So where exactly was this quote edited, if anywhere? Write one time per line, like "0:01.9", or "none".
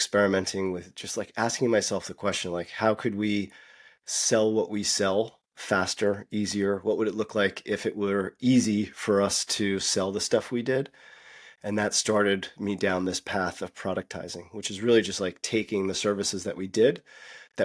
none